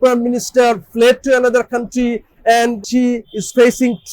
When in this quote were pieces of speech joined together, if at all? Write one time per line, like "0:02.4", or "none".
0:02.8

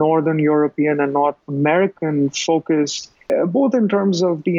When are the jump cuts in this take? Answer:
0:01.4
0:03.3

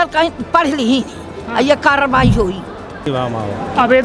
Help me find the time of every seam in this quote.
0:03.1

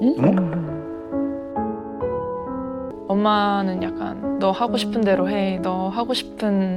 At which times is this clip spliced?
0:02.9

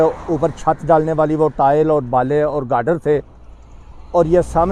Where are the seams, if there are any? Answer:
none

